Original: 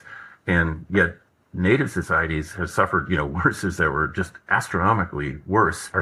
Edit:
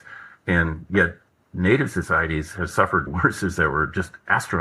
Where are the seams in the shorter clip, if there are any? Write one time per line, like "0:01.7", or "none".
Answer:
0:03.1